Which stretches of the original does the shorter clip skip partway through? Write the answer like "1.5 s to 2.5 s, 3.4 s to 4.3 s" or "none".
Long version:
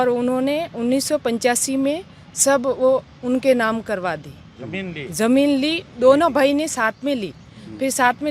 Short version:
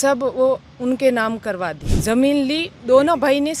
4.3 s to 5.0 s